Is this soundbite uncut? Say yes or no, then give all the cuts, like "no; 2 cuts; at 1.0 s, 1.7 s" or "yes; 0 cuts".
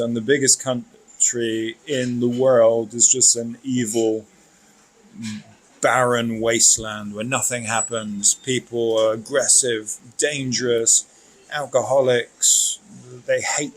yes; 0 cuts